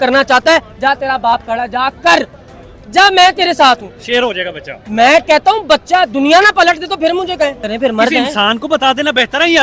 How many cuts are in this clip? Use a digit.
1